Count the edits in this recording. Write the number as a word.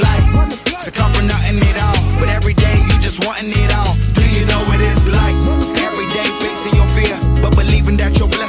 zero